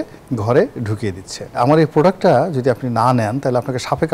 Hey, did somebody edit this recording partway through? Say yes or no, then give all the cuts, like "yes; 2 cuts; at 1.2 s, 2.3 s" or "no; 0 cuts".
yes; 1 cut; at 1.6 s